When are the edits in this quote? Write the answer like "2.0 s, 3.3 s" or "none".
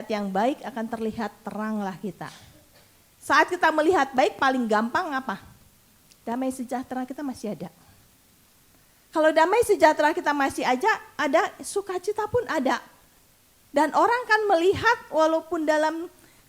none